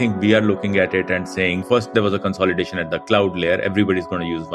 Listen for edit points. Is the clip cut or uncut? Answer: cut